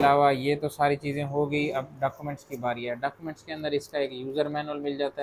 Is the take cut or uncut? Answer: uncut